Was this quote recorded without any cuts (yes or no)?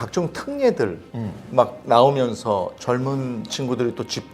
yes